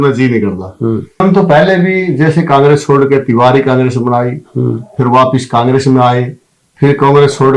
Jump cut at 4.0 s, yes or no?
no